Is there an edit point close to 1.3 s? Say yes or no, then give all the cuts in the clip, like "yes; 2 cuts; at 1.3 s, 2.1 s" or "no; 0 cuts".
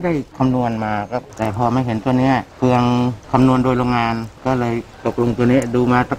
yes; 1 cut; at 1.3 s